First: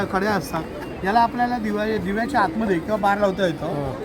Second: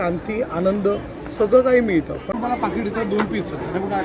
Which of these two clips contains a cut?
second; 1 cut; at 2.3 s

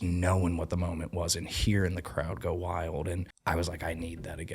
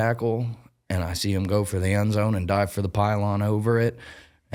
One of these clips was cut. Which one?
first; 1 cut; at 3.3 s

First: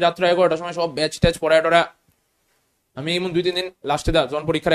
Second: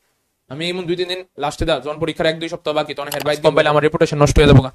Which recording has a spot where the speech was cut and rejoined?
second; 1 cut; at 3.5 s

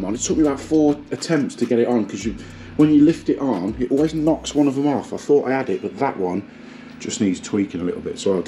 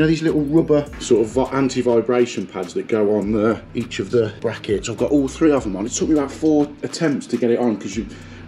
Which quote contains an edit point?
second; 3 cuts; at 0.9 s, 3.7 s, 4.4 s

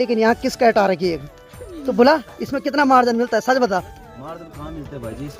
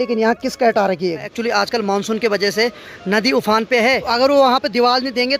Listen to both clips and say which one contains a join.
second; 2 cuts; at 1.3 s, 4.0 s

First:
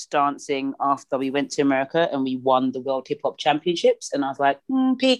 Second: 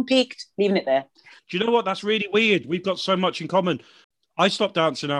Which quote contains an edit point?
second; 2 cuts; at 1.3 s, 4.0 s

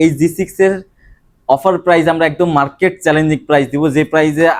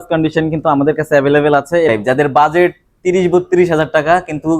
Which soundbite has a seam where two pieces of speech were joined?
second; 1 cut; at 1.9 s

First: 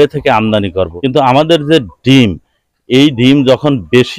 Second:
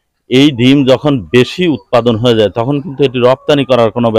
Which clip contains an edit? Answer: first; 1 cut; at 0.9 s

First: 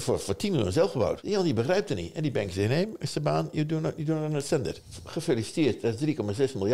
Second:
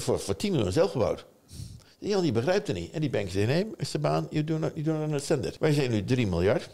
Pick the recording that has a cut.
first; 2 cuts; at 1.2 s, 4.7 s

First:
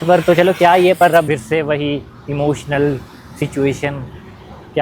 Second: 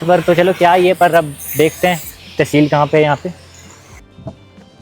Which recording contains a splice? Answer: first; 1 cut; at 1.3 s

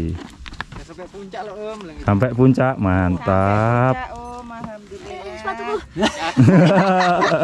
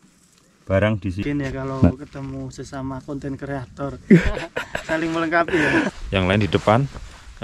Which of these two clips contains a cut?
second; 2 cuts; at 1.2 s, 5.9 s

